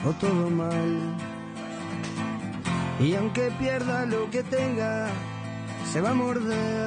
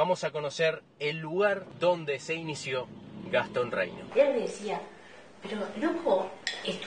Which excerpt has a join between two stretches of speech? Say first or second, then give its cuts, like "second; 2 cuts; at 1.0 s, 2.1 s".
second; 1 cut; at 4.0 s